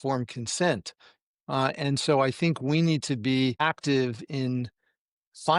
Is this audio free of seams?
no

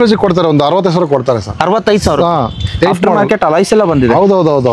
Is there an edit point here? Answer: no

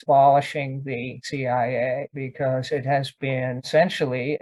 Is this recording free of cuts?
yes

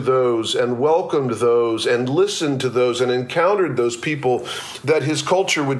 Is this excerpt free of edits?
yes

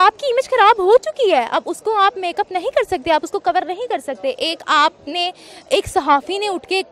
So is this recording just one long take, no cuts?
yes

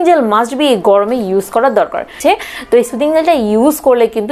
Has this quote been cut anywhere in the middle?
yes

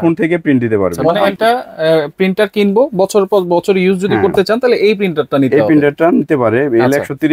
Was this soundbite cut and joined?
yes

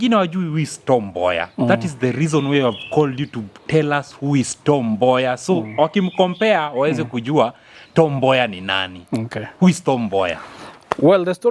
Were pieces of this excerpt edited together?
no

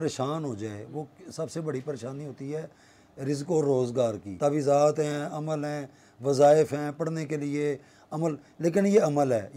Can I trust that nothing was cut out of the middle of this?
no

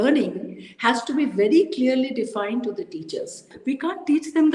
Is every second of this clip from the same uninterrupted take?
no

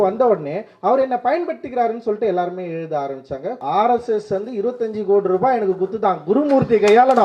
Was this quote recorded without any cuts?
no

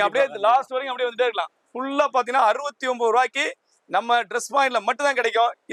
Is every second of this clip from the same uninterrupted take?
yes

